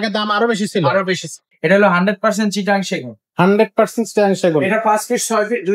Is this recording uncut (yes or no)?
no